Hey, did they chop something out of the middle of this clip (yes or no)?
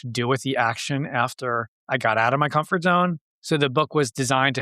yes